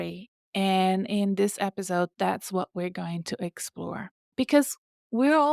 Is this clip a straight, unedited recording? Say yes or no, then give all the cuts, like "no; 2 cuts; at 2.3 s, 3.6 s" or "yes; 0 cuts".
no; 1 cut; at 4.2 s